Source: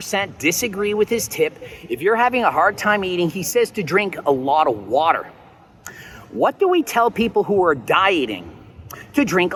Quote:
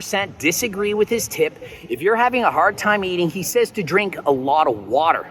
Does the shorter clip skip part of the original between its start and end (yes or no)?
no